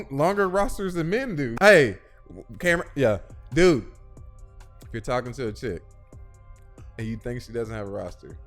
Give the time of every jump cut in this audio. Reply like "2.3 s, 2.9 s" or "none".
1.5 s